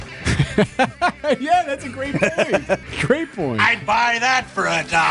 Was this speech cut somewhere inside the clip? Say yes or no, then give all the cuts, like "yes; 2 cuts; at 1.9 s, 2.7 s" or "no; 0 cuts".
yes; 1 cut; at 2.9 s